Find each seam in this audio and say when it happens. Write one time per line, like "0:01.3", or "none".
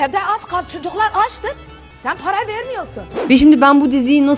0:03.2

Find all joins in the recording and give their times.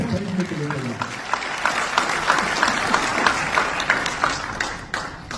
none

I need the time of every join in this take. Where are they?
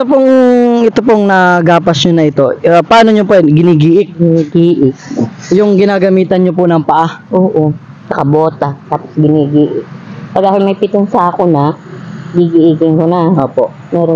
none

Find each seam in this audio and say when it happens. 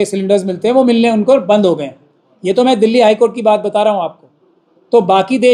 none

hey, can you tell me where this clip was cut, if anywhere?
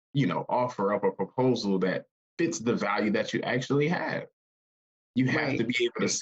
none

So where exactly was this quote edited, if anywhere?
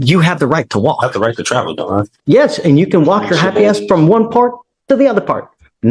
0:02.1
0:04.7

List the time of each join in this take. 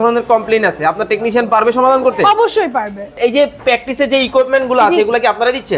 0:03.2

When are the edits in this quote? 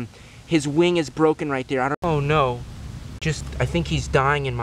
0:01.9
0:03.4

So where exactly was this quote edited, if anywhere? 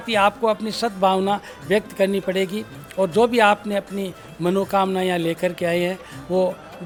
none

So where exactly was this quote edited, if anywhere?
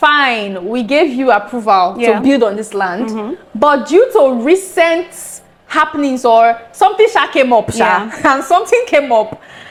none

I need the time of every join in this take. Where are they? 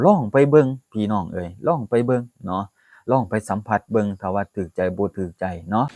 none

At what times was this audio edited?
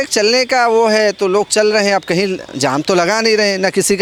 none

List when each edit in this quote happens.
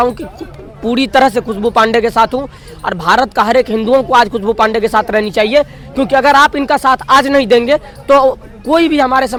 none

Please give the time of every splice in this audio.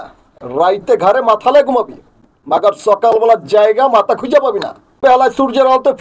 0:05.0

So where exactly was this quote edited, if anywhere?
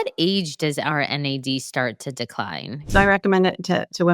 0:02.8

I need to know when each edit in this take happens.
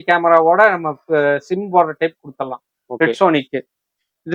none

